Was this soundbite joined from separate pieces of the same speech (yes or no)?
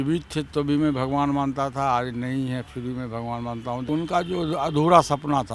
yes